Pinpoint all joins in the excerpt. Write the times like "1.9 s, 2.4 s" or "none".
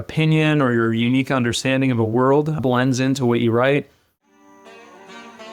4.0 s